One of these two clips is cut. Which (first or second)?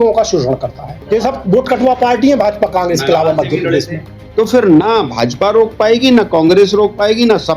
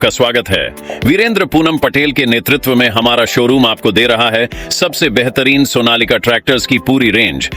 first